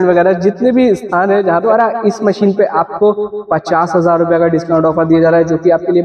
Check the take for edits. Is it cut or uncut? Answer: cut